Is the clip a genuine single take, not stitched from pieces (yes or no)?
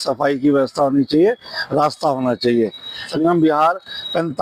no